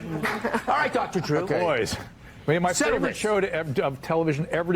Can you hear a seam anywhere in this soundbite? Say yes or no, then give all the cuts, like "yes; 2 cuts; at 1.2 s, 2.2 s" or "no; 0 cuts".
yes; 1 cut; at 3.0 s